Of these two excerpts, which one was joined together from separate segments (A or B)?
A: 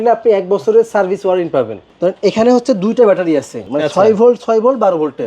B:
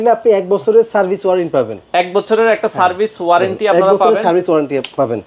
A